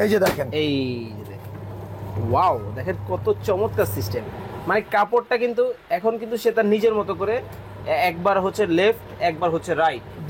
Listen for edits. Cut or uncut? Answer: uncut